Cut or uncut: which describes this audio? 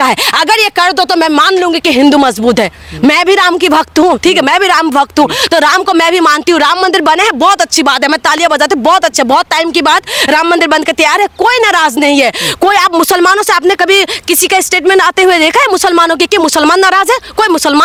uncut